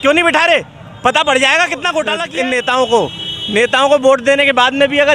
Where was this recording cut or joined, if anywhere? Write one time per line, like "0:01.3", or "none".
0:02.3